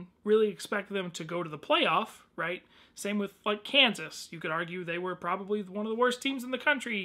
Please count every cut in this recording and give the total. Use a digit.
0